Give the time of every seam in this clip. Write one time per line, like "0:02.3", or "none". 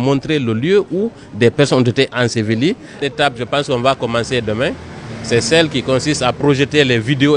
0:03.0